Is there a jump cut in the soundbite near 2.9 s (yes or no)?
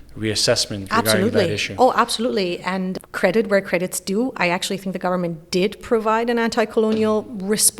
yes